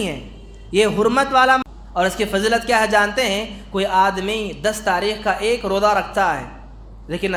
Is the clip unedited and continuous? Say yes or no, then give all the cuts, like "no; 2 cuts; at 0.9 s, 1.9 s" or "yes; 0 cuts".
no; 1 cut; at 1.6 s